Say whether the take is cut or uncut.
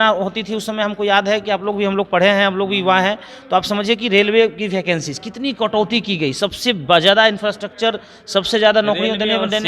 uncut